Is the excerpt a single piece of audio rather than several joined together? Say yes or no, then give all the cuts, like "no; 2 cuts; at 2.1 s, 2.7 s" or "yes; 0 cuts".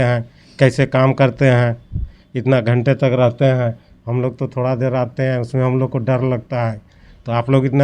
yes; 0 cuts